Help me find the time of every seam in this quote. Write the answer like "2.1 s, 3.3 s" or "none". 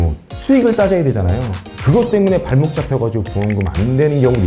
1.7 s